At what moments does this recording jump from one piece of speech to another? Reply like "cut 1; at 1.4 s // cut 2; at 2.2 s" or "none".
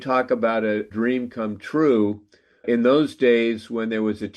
cut 1; at 0.9 s // cut 2; at 2.7 s

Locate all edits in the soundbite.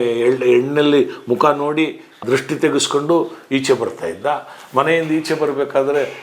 cut 1; at 2.2 s

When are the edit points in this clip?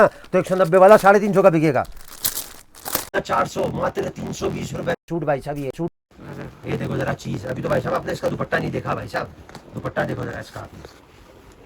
cut 1; at 3.2 s

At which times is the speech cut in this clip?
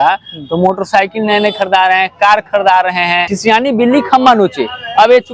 cut 1; at 3.3 s

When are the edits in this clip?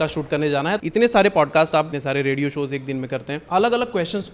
cut 1; at 0.8 s // cut 2; at 1.9 s // cut 3; at 3.4 s

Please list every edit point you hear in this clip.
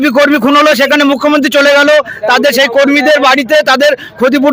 none

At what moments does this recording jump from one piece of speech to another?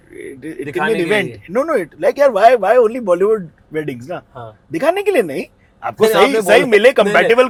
none

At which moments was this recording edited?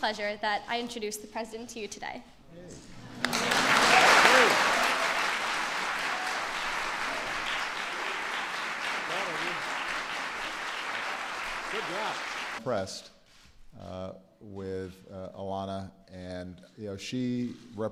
none

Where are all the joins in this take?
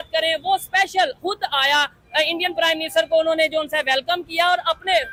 none

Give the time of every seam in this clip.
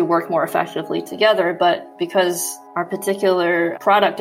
cut 1; at 1.9 s

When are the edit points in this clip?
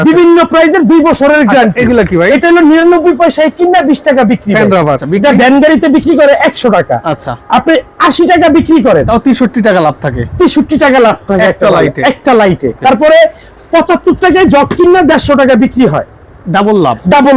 cut 1; at 5.0 s // cut 2; at 9.1 s // cut 3; at 12.8 s

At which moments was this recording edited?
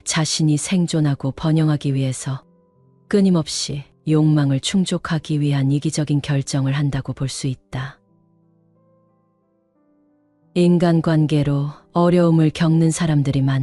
none

